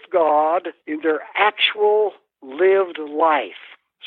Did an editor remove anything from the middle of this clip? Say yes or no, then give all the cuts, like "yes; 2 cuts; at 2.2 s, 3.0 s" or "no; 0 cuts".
no; 0 cuts